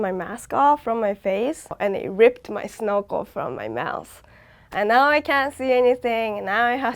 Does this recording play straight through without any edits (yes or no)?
no